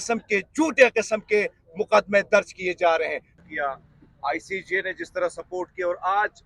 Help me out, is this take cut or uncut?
cut